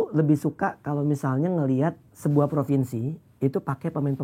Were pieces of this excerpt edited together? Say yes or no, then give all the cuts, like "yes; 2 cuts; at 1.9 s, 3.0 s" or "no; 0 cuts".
yes; 1 cut; at 2.1 s